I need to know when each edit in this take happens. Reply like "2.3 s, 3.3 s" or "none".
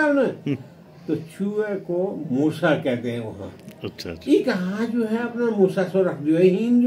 none